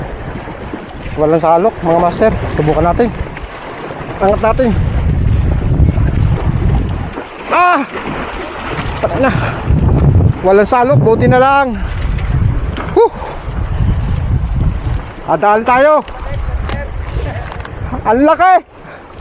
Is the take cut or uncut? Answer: uncut